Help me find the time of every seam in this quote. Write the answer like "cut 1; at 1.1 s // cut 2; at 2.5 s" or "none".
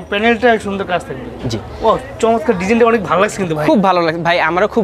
none